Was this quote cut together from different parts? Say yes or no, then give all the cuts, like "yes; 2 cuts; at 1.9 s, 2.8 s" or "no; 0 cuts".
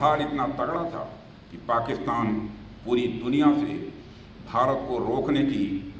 no; 0 cuts